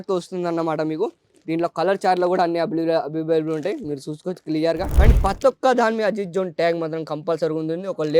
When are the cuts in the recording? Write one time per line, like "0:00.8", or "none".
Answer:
0:04.9